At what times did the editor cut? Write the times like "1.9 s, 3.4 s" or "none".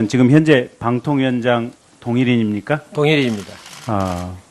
3.2 s

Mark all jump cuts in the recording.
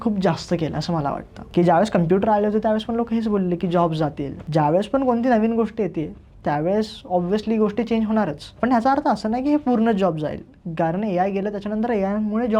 1.3 s, 4.3 s, 8.6 s

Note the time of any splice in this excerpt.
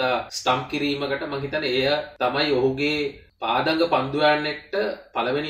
none

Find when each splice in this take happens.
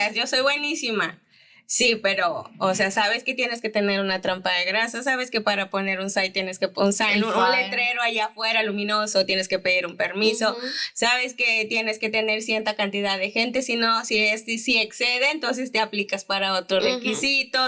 none

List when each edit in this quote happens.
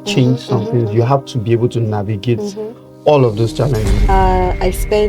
4.1 s

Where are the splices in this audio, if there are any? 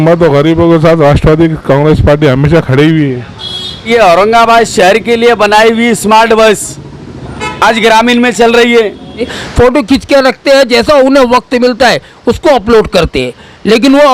3.9 s, 9.4 s

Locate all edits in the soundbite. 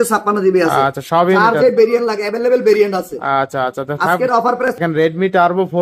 4.8 s

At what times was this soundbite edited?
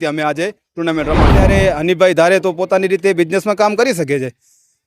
1.4 s

